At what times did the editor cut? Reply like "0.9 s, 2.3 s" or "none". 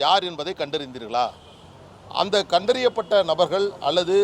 none